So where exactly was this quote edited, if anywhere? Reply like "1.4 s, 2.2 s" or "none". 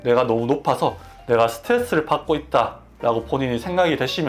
none

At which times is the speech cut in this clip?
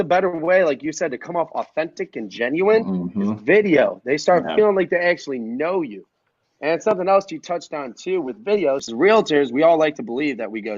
8.9 s

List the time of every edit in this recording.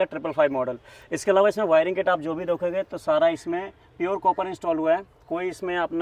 none

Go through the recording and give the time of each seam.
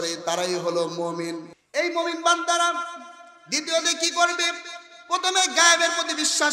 1.5 s

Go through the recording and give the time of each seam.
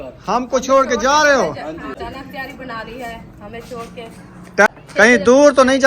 2.0 s, 4.7 s

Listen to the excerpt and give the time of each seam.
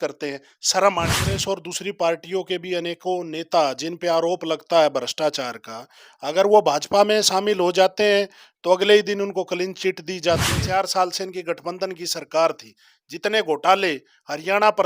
1.3 s, 10.6 s

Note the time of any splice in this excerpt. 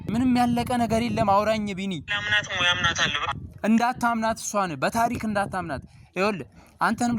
none

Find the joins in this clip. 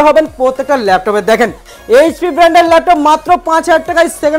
1.7 s

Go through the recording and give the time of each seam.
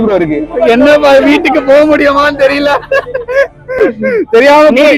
none

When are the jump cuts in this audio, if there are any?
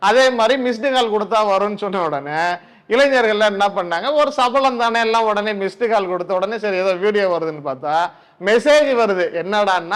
none

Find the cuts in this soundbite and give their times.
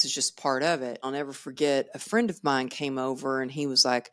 1.0 s

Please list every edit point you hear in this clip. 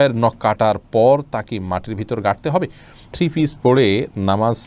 3.0 s

